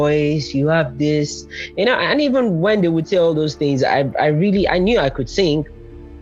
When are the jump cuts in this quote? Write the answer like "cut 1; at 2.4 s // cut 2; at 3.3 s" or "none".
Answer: none